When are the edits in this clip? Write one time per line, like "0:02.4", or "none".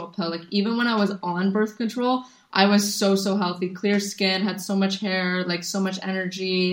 none